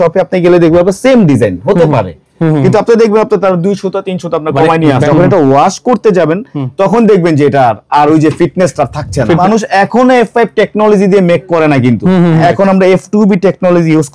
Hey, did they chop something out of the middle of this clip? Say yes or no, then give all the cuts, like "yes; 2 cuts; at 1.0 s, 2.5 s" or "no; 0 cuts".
yes; 3 cuts; at 5.0 s, 9.4 s, 12.4 s